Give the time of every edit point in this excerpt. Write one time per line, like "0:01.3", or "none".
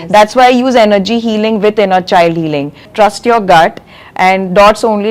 0:02.9

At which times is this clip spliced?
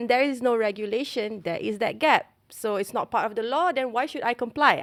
none

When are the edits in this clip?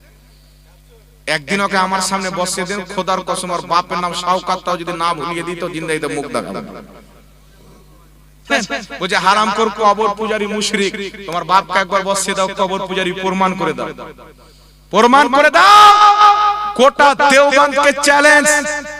0:08.4

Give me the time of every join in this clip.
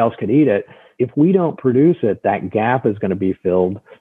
0:00.9

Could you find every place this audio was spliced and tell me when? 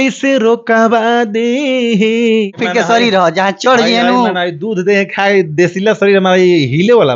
0:02.6

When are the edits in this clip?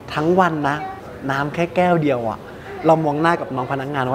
0:01.0

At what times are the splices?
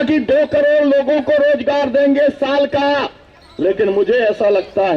none

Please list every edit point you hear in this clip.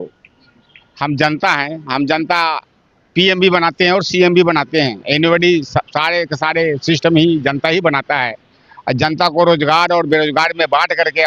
none

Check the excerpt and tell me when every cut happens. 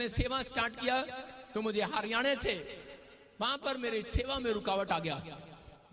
none

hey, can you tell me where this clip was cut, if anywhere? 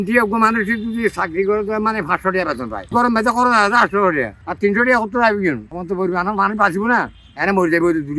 0:02.9
0:05.7

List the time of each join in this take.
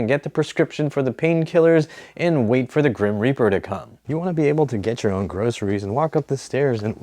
0:03.9

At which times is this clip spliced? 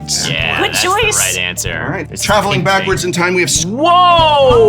0:03.6

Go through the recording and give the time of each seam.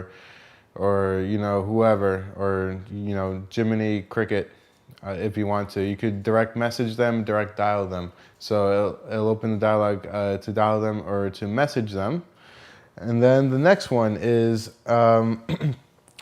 none

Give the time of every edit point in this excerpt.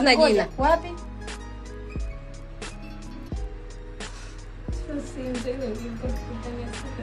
0:01.0
0:04.8

